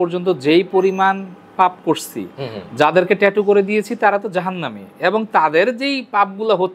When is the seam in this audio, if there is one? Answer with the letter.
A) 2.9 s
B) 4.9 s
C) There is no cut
C